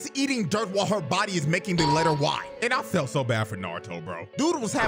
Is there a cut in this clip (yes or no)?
no